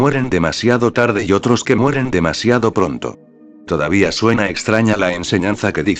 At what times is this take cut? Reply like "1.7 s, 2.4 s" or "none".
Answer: 0.9 s